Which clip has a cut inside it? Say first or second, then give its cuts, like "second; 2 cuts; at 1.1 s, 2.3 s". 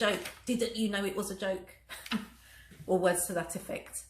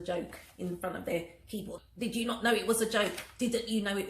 second; 1 cut; at 1.8 s